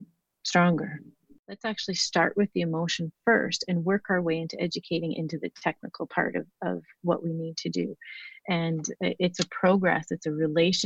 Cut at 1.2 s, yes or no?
yes